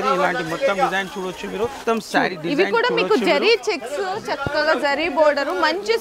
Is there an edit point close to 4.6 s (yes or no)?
no